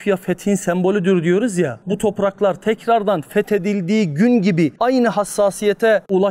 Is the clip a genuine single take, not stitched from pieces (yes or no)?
yes